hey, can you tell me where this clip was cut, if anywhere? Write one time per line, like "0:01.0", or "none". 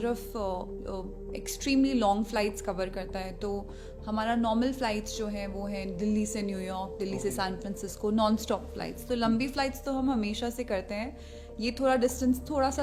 none